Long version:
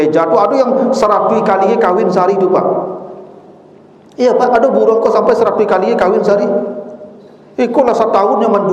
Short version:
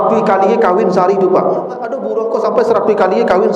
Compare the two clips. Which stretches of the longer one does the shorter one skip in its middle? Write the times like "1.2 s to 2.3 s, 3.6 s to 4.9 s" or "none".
3.2 s to 4.7 s